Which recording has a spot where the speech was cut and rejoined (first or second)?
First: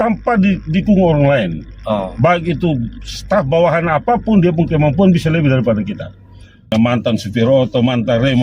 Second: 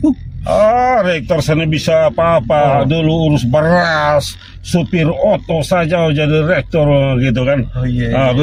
first